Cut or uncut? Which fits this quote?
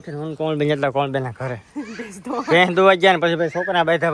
uncut